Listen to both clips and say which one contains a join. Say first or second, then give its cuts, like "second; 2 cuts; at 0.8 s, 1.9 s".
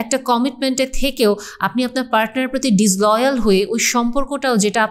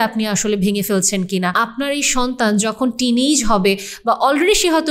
second; 1 cut; at 1.5 s